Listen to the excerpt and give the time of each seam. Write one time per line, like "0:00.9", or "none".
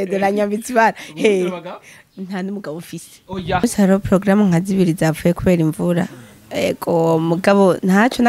0:03.6